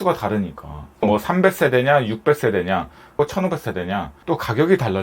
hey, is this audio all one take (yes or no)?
no